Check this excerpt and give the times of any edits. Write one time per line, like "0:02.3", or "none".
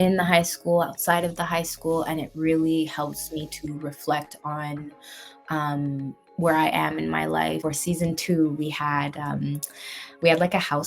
0:07.6